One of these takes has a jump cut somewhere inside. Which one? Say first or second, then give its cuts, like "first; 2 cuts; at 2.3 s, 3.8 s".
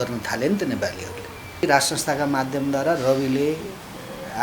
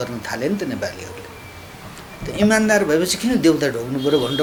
first; 1 cut; at 1.6 s